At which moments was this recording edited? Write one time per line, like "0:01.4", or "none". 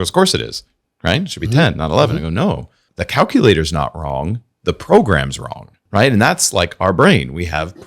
0:05.8